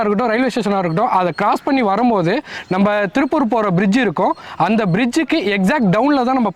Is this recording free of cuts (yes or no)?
yes